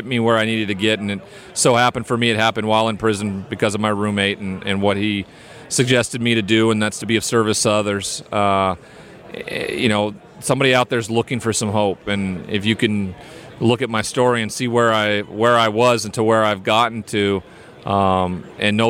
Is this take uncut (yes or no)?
yes